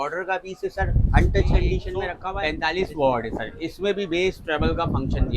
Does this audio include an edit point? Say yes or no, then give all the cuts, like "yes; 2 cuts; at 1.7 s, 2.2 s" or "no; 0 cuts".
yes; 1 cut; at 2.3 s